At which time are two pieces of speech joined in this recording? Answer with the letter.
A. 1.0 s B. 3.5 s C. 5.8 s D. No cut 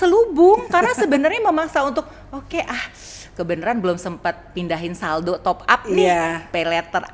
D